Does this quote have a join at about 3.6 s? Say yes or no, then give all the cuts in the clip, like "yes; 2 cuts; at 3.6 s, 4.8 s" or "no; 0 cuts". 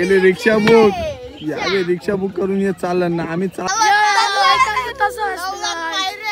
yes; 1 cut; at 3.6 s